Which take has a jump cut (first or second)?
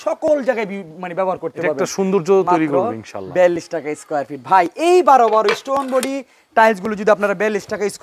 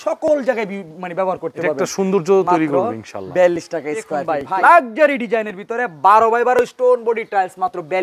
second